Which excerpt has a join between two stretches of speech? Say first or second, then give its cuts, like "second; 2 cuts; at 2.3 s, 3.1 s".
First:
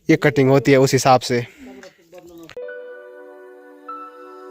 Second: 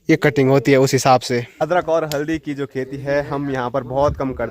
second; 1 cut; at 1.5 s